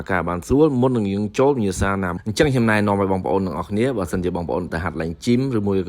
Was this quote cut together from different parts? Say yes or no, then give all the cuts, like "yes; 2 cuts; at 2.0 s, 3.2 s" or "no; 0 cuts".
yes; 1 cut; at 2.1 s